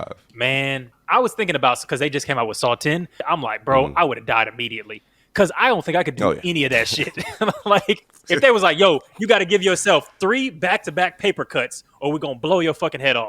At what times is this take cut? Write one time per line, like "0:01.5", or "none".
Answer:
0:00.9
0:03.2
0:08.4

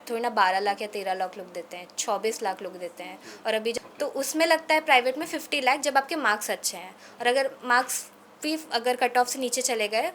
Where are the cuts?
0:03.7

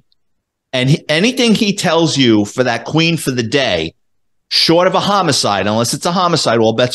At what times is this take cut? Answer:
none

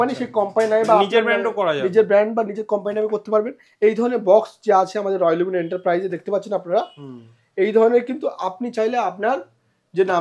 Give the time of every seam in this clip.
none

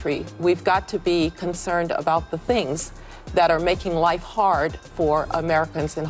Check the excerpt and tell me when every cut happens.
none

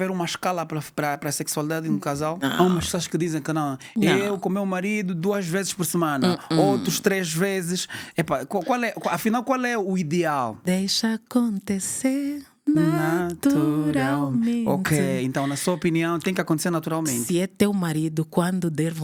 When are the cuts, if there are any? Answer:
none

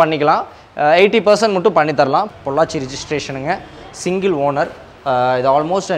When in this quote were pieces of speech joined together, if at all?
0:02.3

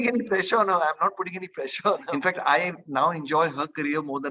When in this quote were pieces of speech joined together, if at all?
0:02.1

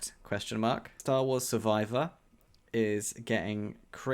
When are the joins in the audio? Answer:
0:00.9

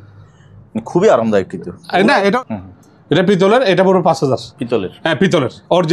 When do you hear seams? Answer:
0:02.4
0:04.5

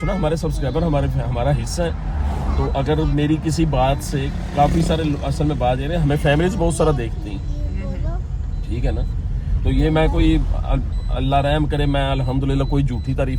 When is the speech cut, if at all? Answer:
none

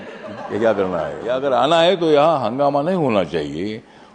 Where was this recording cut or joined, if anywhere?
0:01.2

